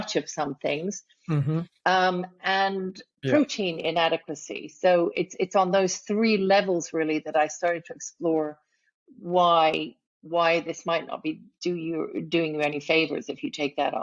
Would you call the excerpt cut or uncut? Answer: uncut